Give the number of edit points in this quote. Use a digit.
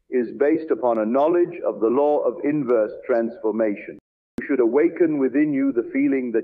1